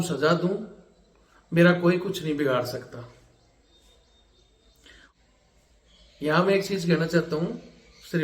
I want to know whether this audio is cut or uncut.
cut